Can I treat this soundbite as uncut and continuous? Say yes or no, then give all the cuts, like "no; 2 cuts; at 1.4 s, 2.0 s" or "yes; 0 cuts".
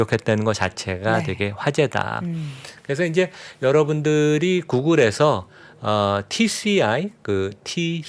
yes; 0 cuts